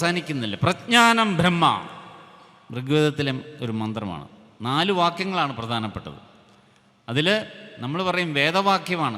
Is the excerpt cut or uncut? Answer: uncut